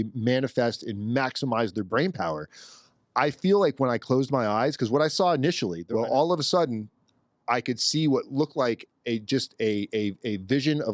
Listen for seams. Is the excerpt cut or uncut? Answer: cut